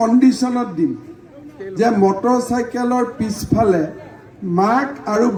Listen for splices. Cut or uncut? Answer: uncut